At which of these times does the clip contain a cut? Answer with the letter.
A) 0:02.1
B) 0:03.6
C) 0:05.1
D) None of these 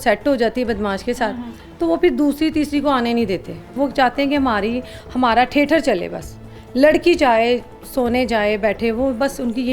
B